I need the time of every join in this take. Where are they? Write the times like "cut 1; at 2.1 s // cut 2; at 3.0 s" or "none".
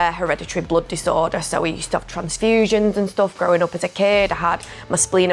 none